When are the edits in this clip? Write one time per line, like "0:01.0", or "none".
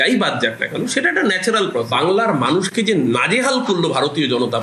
none